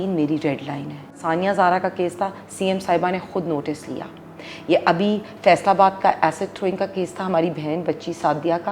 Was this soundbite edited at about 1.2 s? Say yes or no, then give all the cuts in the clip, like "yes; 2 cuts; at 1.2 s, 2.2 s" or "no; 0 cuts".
yes; 1 cut; at 1.2 s